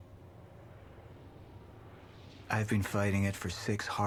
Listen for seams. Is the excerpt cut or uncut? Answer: uncut